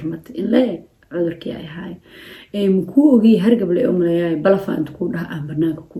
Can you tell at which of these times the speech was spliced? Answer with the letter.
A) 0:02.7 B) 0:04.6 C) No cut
C